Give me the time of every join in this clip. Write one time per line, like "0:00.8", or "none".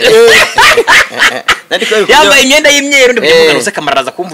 none

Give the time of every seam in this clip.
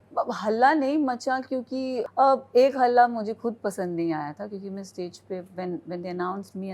0:01.9

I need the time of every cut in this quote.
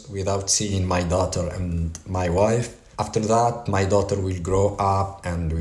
0:02.8

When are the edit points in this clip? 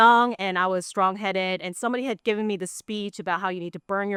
none

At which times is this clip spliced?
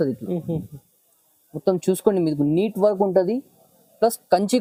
none

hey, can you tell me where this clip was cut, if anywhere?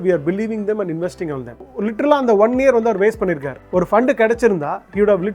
0:01.6

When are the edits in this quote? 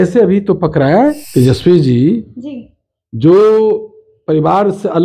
0:01.2

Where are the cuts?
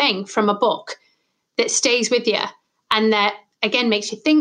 none

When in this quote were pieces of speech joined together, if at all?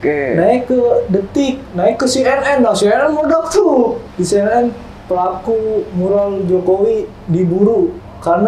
0:04.1

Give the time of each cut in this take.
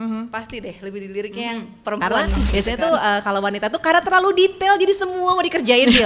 0:02.5

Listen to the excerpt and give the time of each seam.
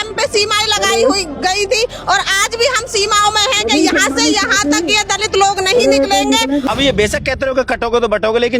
0:06.6

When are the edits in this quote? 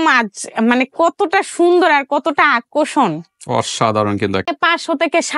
0:04.5

